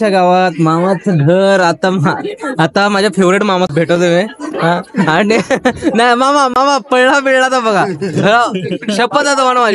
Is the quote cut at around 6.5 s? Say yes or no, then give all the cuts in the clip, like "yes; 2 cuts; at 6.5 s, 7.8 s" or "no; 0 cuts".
no; 1 cut; at 3.7 s